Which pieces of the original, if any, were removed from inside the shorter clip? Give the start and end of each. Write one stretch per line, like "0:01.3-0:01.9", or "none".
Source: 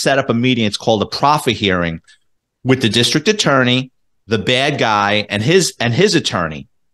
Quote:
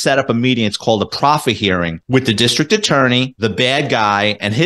0:02.0-0:02.5
0:03.9-0:04.2